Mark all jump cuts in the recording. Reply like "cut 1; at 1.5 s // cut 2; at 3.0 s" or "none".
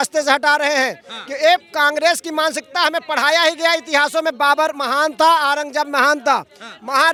none